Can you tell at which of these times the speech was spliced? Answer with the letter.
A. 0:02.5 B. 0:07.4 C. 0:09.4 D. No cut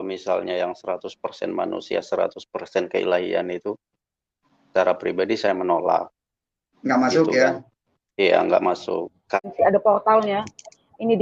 C